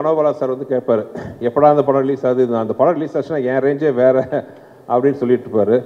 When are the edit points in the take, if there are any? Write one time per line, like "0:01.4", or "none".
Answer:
none